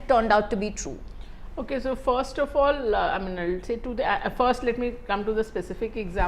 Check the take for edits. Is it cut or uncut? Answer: uncut